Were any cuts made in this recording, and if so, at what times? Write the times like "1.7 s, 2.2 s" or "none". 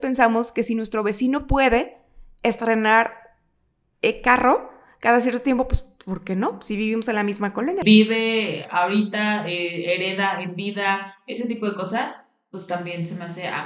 7.8 s